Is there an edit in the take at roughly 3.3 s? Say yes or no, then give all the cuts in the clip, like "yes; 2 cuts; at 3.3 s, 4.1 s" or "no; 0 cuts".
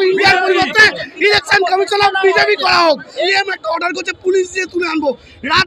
yes; 1 cut; at 3.3 s